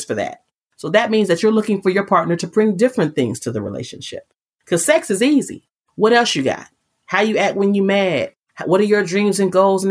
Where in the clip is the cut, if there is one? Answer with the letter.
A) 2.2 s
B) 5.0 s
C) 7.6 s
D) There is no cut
D